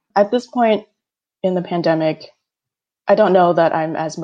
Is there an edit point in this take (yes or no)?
no